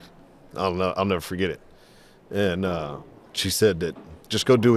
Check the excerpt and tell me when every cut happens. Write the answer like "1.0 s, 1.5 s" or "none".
none